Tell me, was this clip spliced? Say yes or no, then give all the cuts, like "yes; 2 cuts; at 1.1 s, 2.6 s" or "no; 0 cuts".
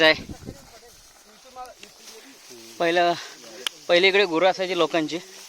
yes; 1 cut; at 1.9 s